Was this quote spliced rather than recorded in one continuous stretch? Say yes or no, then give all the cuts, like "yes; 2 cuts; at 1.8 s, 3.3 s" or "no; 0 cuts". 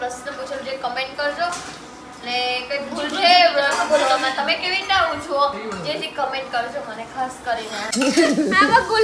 yes; 1 cut; at 7.9 s